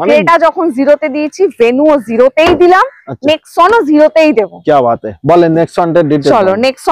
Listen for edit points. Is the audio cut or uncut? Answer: uncut